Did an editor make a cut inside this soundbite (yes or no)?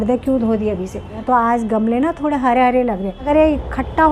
yes